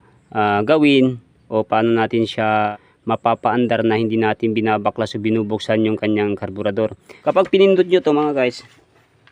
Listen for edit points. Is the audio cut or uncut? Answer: cut